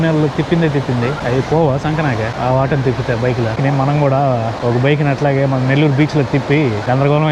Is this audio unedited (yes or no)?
yes